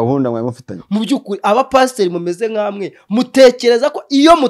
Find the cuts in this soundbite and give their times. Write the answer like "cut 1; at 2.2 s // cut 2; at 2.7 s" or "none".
none

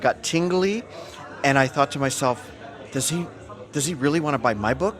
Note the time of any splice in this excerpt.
none

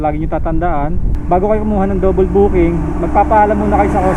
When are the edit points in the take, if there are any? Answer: none

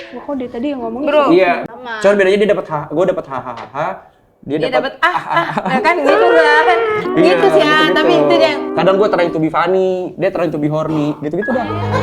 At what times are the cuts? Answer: cut 1; at 1.6 s // cut 2; at 8.7 s

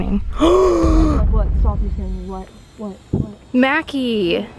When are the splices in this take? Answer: none

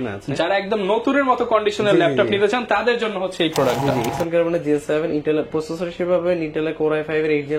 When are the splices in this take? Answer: cut 1; at 4.1 s

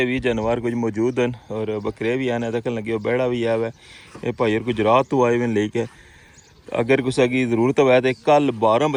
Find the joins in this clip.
none

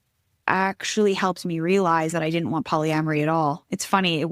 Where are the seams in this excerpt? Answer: none

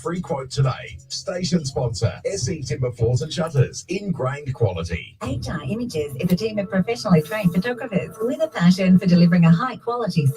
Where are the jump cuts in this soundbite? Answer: cut 1; at 5.2 s

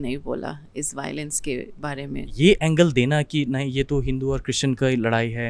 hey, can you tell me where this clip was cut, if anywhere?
cut 1; at 2.2 s

